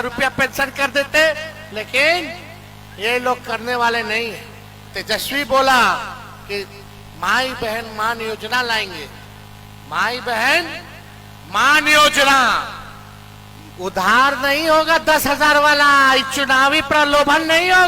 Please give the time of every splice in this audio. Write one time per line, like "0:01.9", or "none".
none